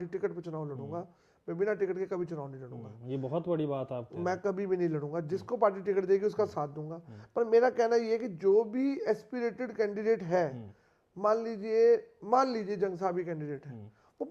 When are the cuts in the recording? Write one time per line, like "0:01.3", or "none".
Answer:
none